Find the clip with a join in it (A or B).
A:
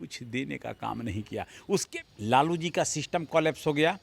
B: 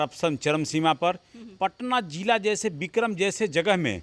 A